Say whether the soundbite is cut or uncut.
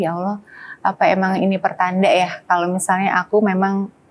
uncut